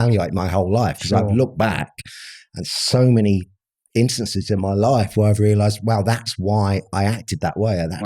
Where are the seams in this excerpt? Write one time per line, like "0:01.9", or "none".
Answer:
none